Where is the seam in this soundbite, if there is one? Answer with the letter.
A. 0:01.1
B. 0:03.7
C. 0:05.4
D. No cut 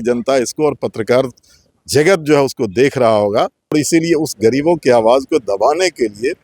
B